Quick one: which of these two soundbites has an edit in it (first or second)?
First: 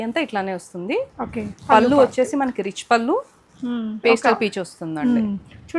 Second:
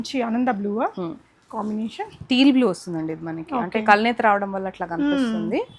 first